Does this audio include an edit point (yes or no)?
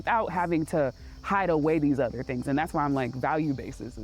no